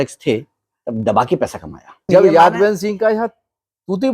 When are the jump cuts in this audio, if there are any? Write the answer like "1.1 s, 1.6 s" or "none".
2.1 s

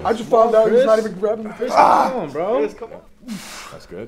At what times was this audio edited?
2.8 s

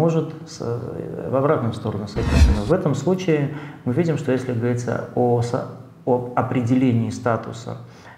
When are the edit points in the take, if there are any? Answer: 2.5 s

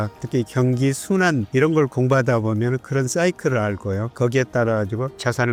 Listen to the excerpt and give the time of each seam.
none

